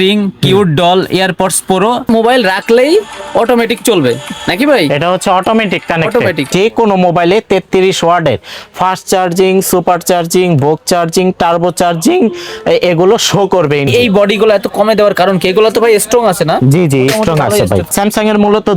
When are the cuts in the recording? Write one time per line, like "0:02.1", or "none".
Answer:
0:02.1
0:06.5
0:13.9
0:17.8